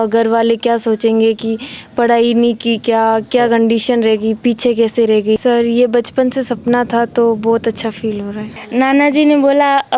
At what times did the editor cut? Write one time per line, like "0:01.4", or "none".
0:05.4
0:08.5